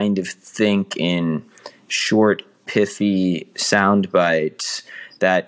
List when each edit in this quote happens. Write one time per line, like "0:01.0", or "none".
none